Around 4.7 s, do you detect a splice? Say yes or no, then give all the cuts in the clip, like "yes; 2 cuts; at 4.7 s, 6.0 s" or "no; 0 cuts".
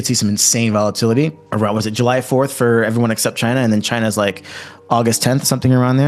no; 0 cuts